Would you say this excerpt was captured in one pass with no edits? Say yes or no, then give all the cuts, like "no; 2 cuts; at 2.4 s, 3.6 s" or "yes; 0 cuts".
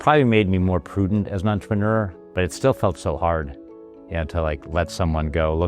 no; 1 cut; at 2.2 s